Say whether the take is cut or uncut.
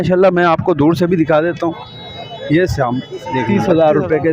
cut